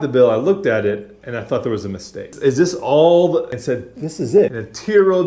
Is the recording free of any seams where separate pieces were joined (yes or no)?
yes